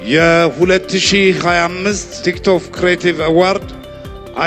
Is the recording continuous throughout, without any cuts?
no; 1 cut; at 2.1 s

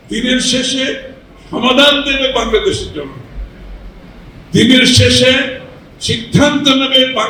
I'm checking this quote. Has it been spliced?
no; 0 cuts

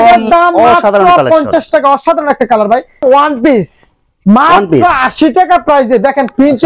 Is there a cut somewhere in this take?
yes; 1 cut; at 2.9 s

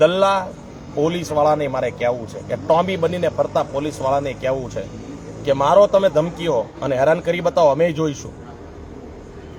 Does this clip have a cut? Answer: no; 0 cuts

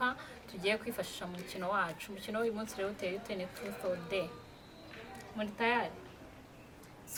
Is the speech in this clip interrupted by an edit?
no; 0 cuts

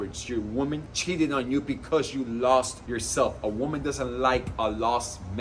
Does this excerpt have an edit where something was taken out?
yes; 2 cuts; at 0.9 s, 2.8 s

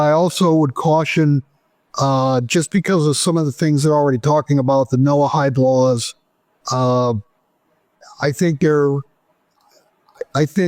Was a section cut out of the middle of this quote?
no; 0 cuts

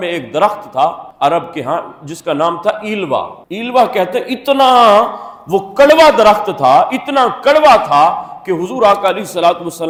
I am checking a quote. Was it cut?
no; 0 cuts

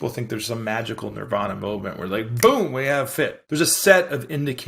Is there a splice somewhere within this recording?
yes; 1 cut; at 3.4 s

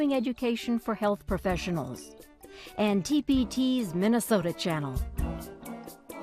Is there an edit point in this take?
yes; 1 cut; at 5.0 s

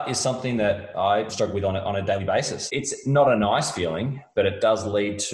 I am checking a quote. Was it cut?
yes; 2 cuts; at 1.3 s, 2.6 s

